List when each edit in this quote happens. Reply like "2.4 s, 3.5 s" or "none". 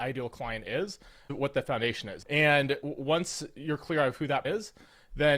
2.1 s, 4.4 s